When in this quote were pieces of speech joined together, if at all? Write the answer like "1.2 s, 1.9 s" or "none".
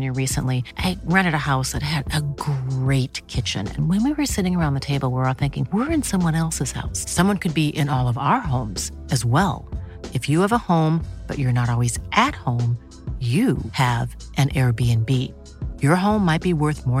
none